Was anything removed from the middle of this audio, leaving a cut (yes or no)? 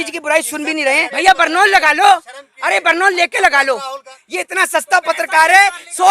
yes